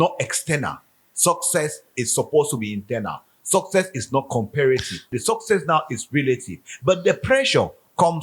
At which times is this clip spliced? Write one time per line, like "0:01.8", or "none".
0:05.1